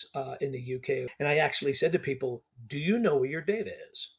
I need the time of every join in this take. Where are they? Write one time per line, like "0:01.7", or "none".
0:01.1